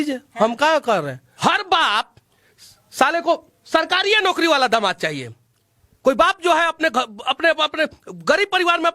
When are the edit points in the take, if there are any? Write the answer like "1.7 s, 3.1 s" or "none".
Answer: 1.2 s